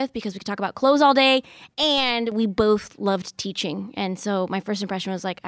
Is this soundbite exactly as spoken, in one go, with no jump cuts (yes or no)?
yes